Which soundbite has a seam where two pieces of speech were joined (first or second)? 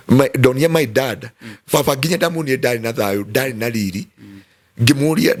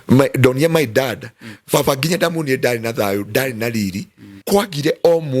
second